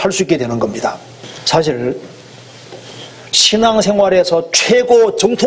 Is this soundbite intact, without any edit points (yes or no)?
yes